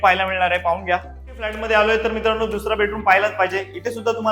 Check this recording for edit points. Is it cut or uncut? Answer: cut